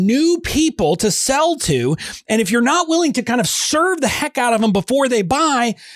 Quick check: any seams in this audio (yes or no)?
no